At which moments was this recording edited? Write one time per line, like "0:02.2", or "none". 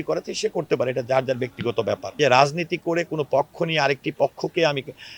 0:02.1